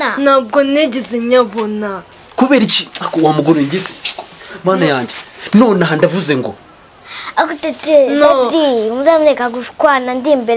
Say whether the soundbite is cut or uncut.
uncut